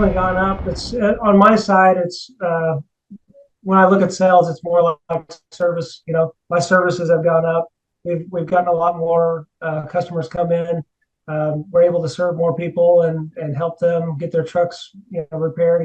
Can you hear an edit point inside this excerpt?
no; 0 cuts

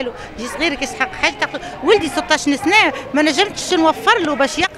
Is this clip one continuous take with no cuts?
yes; 0 cuts

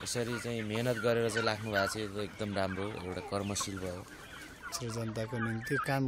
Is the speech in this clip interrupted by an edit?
yes; 1 cut; at 4.8 s

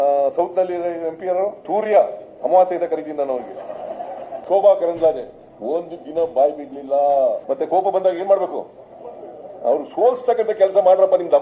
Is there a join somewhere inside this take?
yes; 3 cuts; at 1.6 s, 4.3 s, 7.4 s

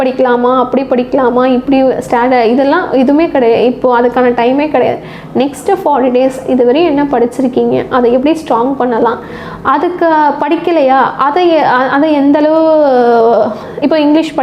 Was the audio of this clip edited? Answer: no; 0 cuts

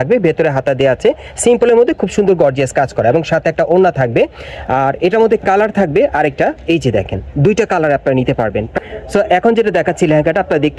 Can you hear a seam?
yes; 1 cut; at 8.7 s

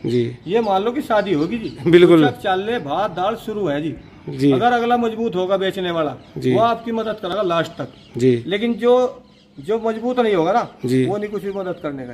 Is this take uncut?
yes; 0 cuts

